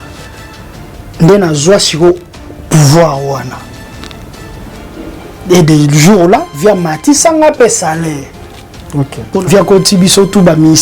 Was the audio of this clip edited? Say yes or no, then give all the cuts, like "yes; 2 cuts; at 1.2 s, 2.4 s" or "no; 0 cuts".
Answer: yes; 1 cut; at 9.4 s